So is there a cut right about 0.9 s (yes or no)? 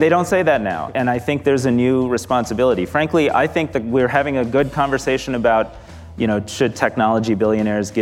yes